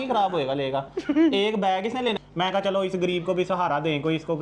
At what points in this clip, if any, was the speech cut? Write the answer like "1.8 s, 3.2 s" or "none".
2.2 s